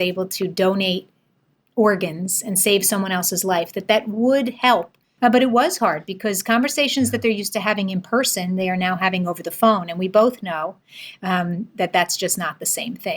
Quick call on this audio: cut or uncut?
cut